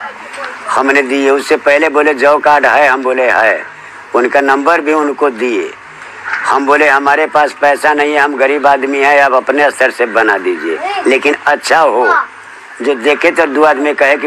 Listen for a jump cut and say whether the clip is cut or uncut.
uncut